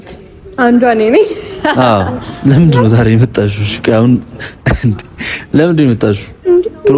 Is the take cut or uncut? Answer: cut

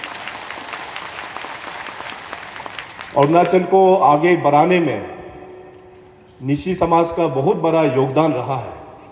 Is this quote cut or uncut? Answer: uncut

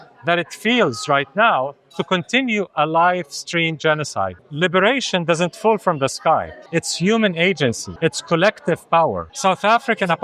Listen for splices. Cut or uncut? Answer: cut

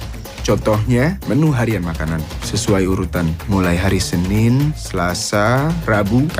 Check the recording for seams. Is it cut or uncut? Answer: uncut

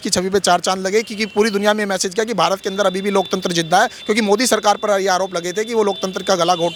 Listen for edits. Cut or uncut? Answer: uncut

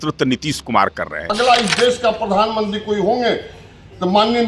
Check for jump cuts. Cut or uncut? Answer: cut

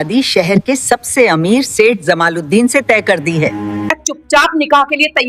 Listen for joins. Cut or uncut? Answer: cut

